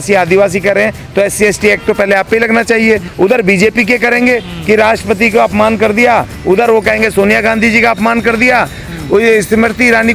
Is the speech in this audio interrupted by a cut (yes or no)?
yes